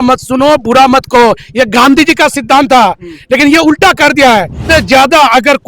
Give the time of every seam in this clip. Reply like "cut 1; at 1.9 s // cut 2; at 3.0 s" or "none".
cut 1; at 4.6 s